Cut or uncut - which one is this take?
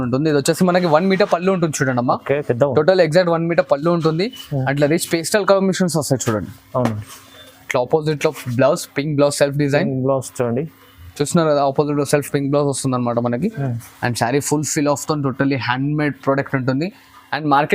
uncut